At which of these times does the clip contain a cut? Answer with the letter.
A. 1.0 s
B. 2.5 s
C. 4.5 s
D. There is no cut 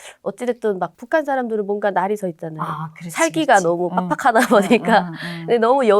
A